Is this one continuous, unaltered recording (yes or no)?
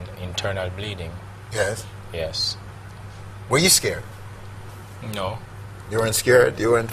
no